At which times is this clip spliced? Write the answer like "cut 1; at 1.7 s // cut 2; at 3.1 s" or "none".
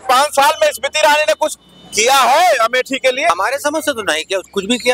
cut 1; at 3.3 s